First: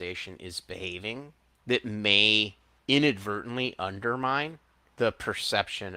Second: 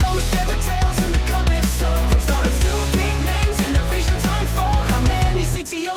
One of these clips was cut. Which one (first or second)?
first